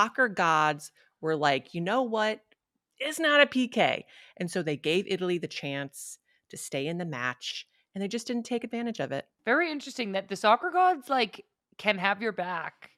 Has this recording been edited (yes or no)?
no